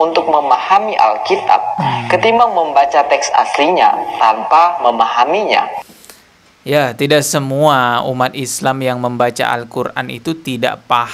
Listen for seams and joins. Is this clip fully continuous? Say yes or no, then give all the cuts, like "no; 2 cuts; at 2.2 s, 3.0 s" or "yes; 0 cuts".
yes; 0 cuts